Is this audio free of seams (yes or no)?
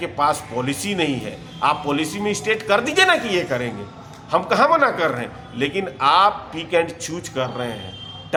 yes